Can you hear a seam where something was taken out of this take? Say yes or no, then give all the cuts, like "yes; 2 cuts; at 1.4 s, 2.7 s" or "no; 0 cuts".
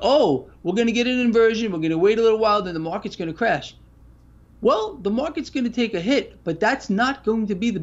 no; 0 cuts